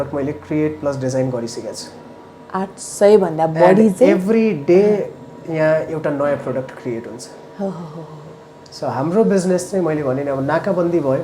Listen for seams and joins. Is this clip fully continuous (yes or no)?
yes